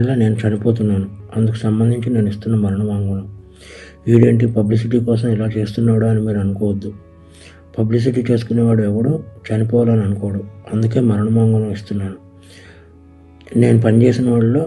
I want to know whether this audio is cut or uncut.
uncut